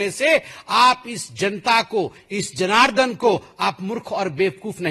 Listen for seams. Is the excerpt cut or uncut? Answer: uncut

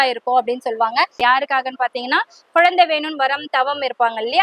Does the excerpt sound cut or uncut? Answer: cut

